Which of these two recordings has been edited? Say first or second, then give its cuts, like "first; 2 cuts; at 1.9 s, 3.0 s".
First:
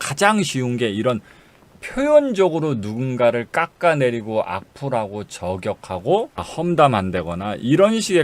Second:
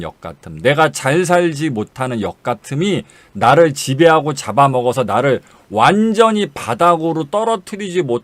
first; 1 cut; at 6.4 s